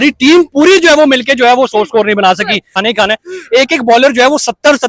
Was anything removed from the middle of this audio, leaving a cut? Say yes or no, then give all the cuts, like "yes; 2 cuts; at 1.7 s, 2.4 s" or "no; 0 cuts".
yes; 1 cut; at 2.8 s